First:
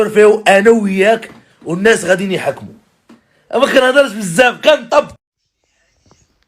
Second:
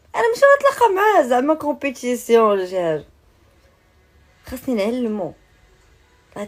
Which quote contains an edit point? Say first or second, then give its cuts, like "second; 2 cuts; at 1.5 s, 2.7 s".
first; 1 cut; at 5.4 s